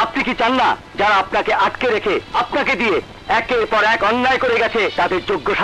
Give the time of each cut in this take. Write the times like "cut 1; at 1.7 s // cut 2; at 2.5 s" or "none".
cut 1; at 0.9 s // cut 2; at 2.3 s // cut 3; at 4.9 s